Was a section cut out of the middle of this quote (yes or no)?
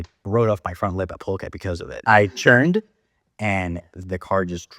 no